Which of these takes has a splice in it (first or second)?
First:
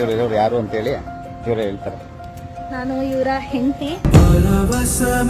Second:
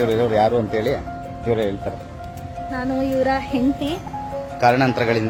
first